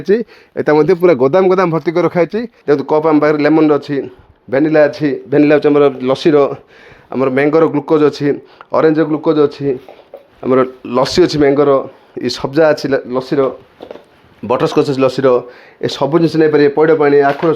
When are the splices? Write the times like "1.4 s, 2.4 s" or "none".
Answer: 2.5 s